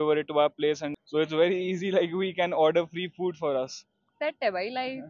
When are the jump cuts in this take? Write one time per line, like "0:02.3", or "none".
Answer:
0:00.9